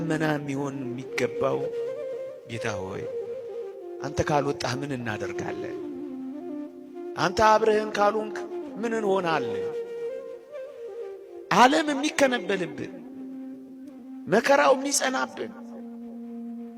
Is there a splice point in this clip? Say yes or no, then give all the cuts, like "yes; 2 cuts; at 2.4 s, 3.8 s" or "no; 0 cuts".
no; 0 cuts